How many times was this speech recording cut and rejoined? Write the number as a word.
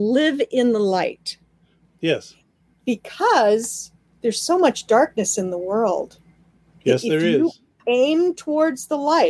zero